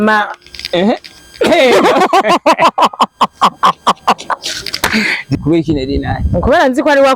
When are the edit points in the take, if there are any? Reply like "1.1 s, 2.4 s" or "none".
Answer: 5.3 s